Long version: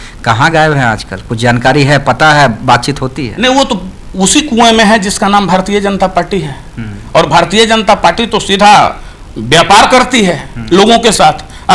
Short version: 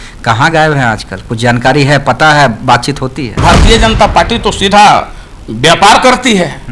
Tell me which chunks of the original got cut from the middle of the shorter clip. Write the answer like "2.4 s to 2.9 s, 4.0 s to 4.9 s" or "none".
3.4 s to 7.3 s